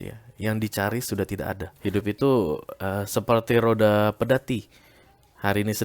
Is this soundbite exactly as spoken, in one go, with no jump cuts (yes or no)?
no